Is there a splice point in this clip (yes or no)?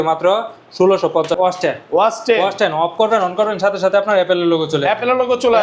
yes